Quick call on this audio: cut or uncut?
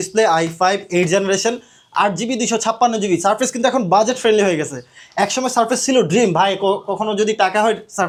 uncut